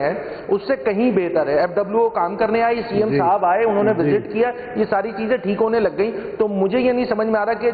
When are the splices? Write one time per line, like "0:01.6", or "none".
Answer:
none